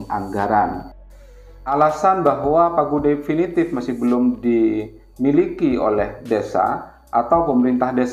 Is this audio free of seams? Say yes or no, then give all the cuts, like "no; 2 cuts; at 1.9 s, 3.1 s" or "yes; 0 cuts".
no; 1 cut; at 1.7 s